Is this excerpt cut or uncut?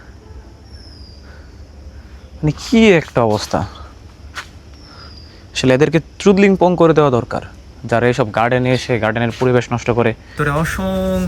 cut